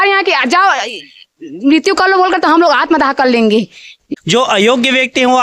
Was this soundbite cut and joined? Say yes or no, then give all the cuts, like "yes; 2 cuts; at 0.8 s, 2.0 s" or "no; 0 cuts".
yes; 1 cut; at 4.0 s